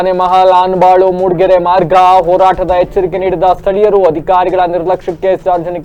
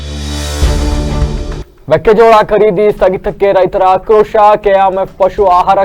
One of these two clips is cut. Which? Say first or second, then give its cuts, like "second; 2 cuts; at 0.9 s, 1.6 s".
second; 1 cut; at 1.7 s